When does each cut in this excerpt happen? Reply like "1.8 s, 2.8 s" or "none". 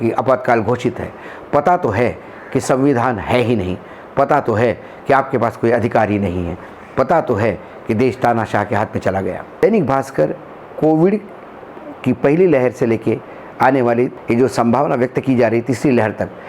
9.6 s, 14.2 s